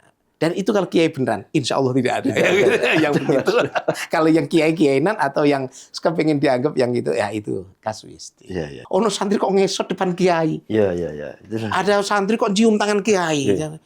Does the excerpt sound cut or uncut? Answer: cut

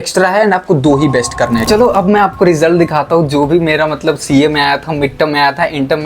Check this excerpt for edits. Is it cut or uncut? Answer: cut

